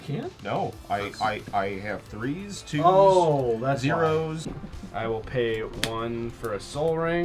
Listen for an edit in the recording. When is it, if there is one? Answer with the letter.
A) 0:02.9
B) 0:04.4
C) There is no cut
B